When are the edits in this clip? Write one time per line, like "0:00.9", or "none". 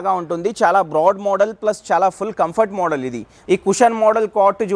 0:03.3

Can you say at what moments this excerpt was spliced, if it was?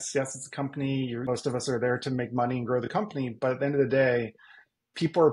0:01.2

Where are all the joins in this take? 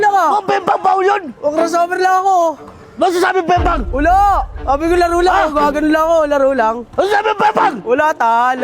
none

